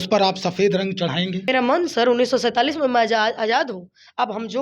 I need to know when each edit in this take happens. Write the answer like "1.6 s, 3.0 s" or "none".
1.5 s